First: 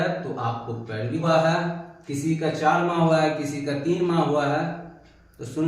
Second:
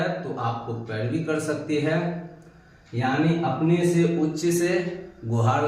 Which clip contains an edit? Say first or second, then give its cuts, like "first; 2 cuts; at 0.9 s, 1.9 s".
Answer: first; 1 cut; at 1.2 s